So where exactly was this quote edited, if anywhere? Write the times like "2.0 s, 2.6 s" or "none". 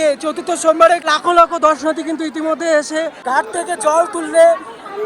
1.1 s, 3.2 s